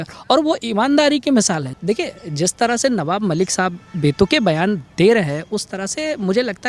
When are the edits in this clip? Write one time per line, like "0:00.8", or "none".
0:01.7